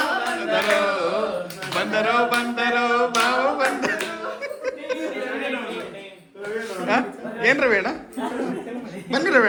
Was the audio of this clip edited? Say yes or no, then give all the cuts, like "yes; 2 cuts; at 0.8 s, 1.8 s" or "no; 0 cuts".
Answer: no; 0 cuts